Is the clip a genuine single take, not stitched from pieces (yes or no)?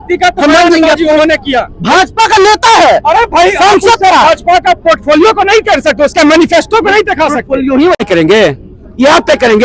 no